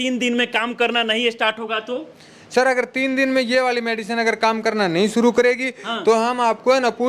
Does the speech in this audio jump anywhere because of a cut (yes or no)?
no